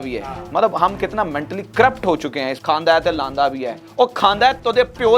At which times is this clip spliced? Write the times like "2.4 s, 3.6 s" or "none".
2.5 s